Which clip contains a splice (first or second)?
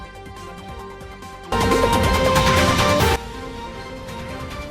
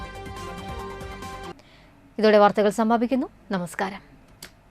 first